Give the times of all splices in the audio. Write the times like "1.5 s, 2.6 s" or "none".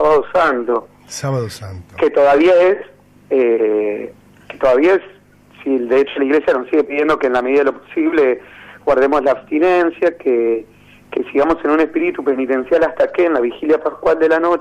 12.6 s